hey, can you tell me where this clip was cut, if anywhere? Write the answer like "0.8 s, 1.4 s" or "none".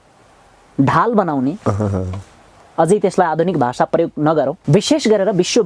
4.6 s